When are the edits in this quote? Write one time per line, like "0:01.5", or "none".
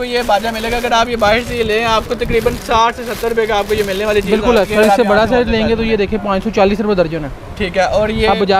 0:04.7